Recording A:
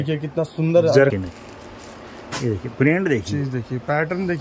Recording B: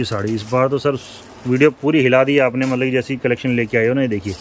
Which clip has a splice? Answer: A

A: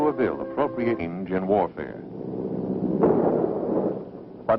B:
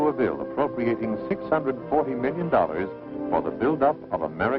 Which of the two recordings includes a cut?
B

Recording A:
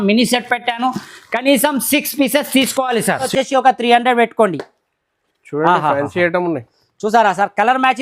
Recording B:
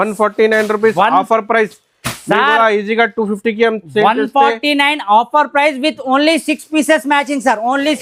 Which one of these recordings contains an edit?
A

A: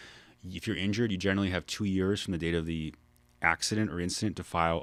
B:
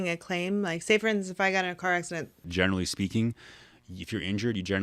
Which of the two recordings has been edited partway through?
B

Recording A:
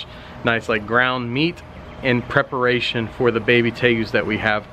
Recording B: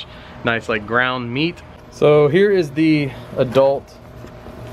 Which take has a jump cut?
B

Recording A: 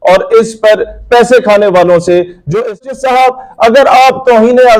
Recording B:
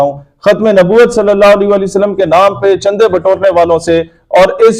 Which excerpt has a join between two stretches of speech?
A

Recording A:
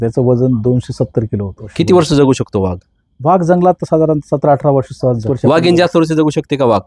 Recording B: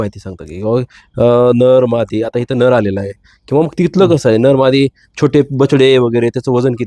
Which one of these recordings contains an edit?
A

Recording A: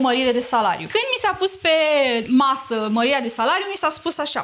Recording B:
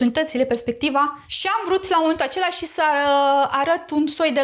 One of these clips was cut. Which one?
A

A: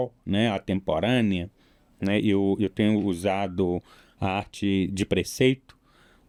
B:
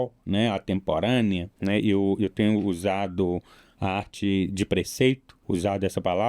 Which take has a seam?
B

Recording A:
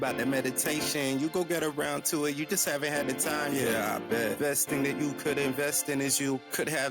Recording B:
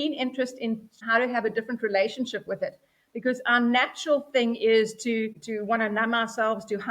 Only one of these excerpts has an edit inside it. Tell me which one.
B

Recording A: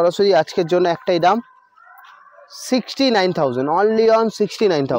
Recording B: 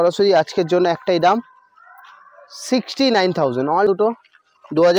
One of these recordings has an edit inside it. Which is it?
B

